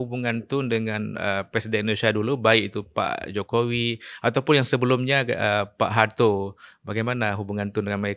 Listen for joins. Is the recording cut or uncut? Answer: uncut